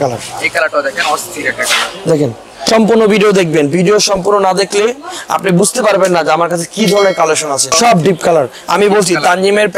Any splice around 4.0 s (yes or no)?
no